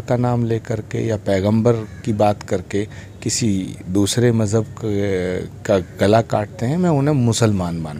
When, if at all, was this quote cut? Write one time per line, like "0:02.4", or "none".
none